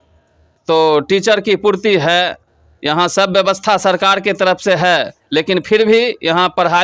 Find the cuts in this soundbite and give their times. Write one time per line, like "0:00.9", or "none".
none